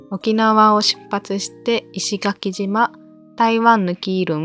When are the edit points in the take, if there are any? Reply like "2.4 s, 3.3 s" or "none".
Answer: none